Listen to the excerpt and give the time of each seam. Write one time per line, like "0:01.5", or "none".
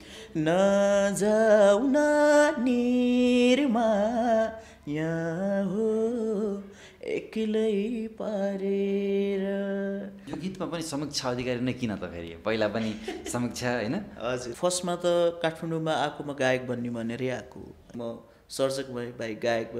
0:10.2
0:14.5
0:17.9